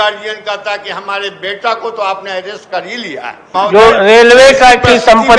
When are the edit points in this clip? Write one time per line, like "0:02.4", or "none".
0:03.5